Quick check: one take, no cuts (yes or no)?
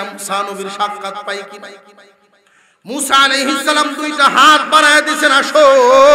yes